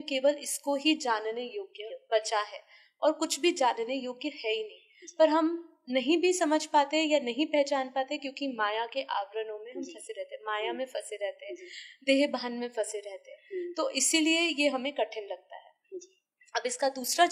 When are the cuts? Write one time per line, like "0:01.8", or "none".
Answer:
none